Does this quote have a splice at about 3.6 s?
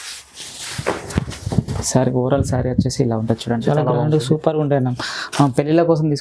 yes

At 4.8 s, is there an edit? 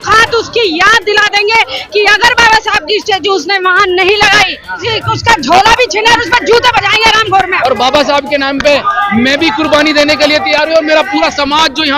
yes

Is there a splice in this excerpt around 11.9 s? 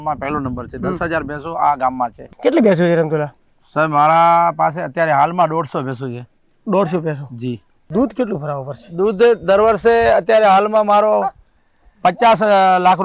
no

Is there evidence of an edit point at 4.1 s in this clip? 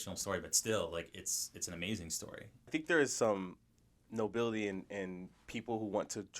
no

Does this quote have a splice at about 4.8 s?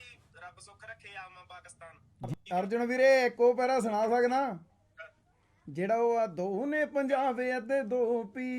no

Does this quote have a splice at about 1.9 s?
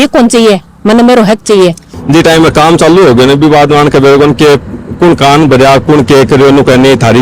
yes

